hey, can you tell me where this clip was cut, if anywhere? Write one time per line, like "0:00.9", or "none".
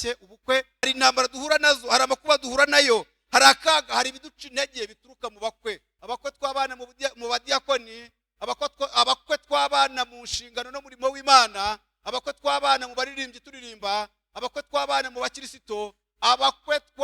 0:00.9
0:05.9